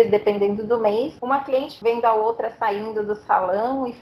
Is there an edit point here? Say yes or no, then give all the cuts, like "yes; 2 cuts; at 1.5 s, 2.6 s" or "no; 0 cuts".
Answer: yes; 1 cut; at 1.6 s